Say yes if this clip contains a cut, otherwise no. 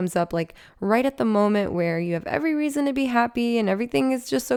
no